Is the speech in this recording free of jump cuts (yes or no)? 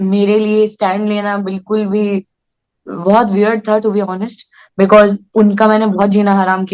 yes